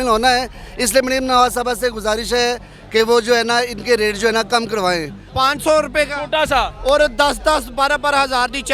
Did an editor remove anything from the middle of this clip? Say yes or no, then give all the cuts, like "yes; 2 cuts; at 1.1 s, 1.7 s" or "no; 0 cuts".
yes; 1 cut; at 5.2 s